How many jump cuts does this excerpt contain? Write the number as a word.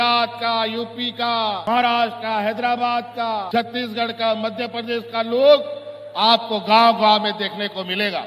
zero